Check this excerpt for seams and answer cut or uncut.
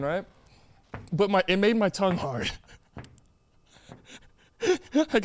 uncut